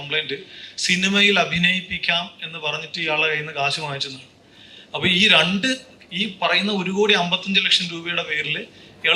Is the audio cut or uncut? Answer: uncut